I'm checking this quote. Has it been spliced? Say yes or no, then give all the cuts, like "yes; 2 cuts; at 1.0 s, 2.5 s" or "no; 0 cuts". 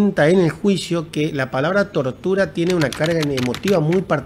no; 0 cuts